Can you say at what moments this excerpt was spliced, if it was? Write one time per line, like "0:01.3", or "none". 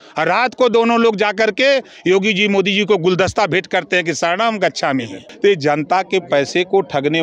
0:05.2